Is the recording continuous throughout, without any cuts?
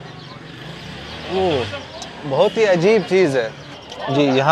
yes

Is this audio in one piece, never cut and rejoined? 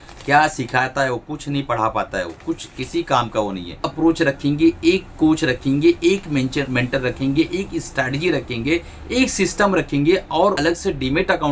no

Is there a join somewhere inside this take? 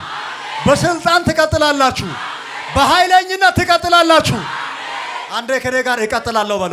no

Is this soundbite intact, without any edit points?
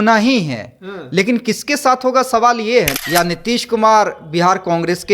no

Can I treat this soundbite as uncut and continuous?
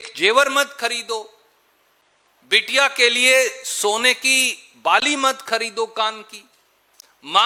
yes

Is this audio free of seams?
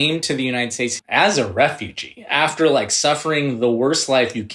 no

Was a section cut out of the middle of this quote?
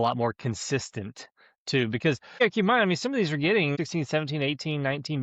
yes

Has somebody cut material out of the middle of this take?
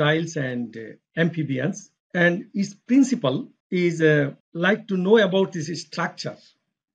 yes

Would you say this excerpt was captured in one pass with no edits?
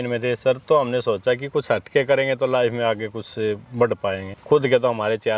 no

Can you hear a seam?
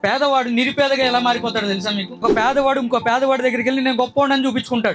yes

